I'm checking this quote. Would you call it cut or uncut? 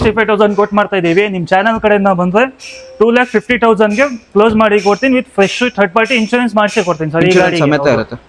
uncut